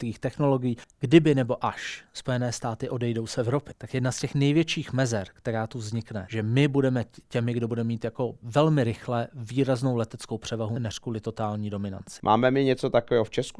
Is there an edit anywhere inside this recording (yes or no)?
yes